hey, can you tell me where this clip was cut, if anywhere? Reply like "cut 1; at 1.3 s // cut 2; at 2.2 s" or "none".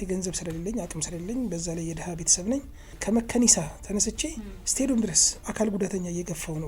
cut 1; at 2.9 s // cut 2; at 5.4 s